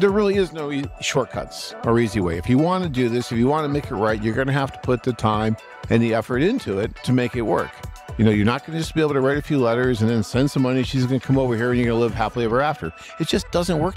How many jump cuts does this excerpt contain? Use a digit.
2